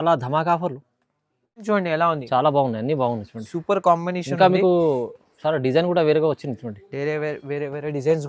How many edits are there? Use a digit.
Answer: 1